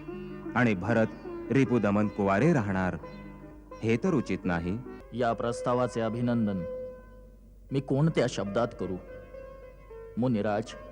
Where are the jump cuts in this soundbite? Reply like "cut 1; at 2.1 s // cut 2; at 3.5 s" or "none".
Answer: cut 1; at 5.0 s